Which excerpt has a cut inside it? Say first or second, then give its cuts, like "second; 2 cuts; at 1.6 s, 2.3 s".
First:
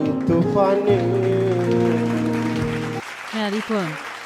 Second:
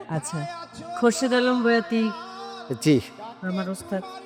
first; 1 cut; at 3.1 s